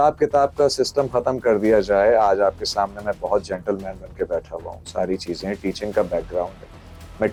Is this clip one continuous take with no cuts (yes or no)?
yes